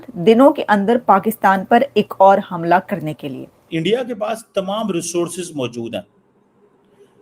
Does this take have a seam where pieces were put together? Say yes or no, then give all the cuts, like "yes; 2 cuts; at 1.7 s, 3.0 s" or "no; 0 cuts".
yes; 1 cut; at 3.6 s